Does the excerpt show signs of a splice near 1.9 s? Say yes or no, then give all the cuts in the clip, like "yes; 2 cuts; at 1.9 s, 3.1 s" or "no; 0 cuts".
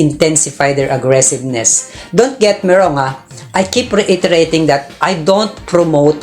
no; 0 cuts